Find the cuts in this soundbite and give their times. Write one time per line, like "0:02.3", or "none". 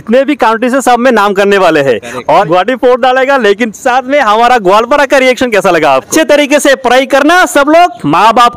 0:02.4
0:06.1